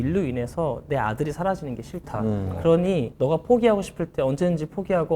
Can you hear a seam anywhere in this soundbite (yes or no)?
no